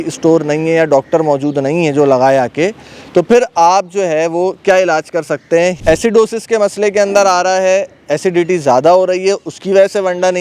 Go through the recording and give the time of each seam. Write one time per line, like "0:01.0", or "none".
0:05.8